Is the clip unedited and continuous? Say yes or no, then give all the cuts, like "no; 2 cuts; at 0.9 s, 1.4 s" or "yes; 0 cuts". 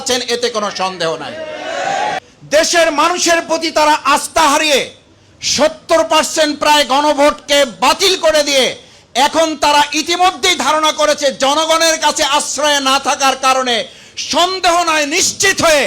no; 1 cut; at 2.2 s